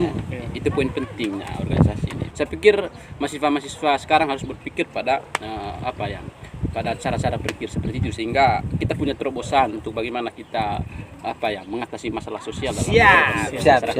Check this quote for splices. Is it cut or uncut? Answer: cut